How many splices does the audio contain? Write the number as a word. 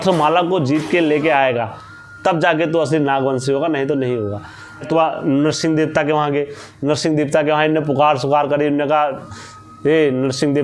one